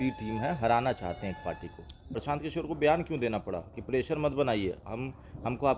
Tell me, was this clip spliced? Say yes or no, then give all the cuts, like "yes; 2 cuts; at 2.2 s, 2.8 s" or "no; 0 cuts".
yes; 1 cut; at 2.2 s